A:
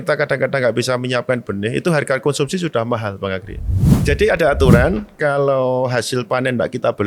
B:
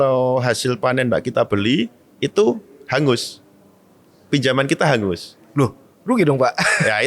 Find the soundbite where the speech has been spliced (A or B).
A